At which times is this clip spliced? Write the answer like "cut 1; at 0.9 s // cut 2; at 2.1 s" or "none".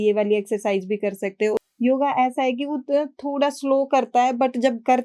cut 1; at 1.6 s

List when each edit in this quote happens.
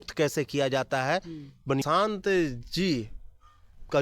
cut 1; at 1.8 s

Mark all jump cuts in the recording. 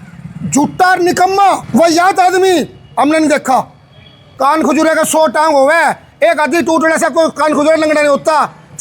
cut 1; at 1.6 s // cut 2; at 4.2 s

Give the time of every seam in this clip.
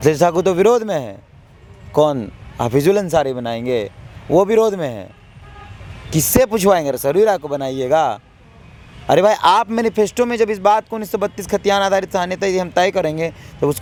none

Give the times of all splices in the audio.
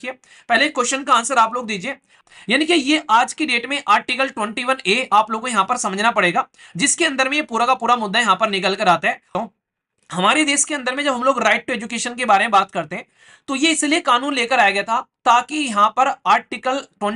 cut 1; at 2.2 s // cut 2; at 9.3 s

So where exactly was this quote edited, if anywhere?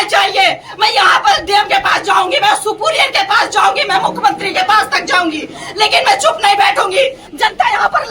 cut 1; at 7.2 s

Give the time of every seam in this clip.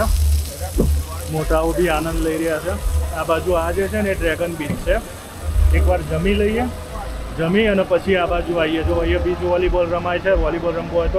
none

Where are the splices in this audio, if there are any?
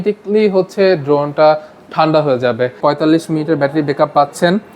cut 1; at 2.8 s

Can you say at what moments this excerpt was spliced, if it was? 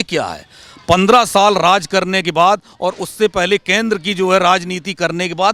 none

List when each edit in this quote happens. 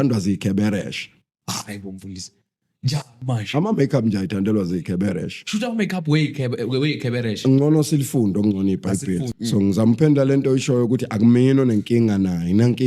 cut 1; at 9.3 s

